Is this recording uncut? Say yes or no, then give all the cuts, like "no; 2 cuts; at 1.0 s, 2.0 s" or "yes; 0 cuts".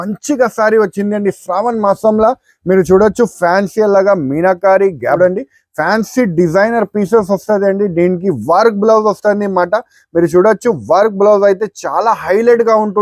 no; 1 cut; at 5.2 s